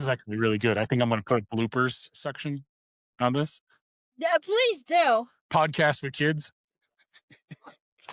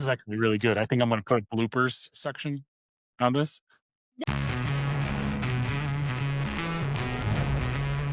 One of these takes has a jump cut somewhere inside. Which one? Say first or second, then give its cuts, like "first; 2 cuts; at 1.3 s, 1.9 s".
second; 1 cut; at 4.2 s